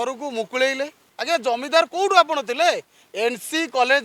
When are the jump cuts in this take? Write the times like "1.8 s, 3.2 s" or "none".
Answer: 1.1 s